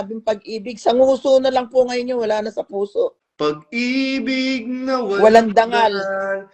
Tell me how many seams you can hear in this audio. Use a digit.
1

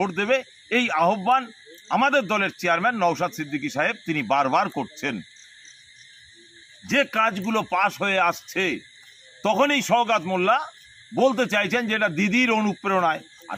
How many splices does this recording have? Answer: 1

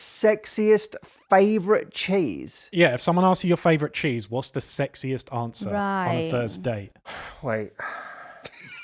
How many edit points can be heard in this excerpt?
0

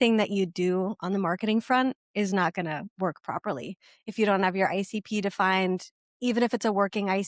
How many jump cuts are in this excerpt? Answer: 0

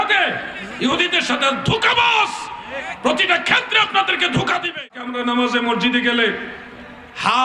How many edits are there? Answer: 1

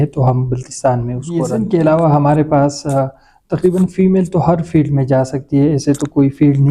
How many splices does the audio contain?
1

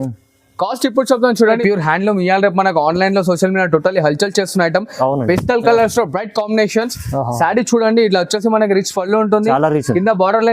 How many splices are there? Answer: 1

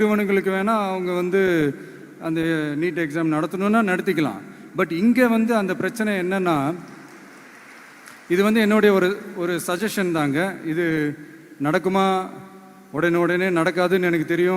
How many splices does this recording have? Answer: 0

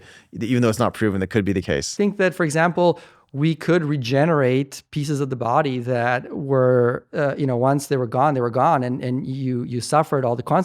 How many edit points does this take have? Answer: 1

